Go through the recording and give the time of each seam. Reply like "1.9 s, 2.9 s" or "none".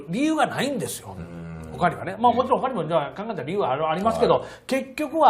1.6 s

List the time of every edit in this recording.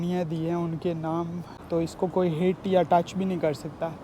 1.5 s

